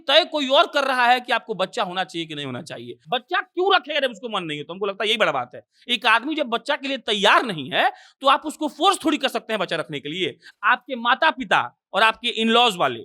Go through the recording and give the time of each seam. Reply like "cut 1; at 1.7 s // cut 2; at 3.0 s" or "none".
cut 1; at 2.9 s // cut 2; at 10.4 s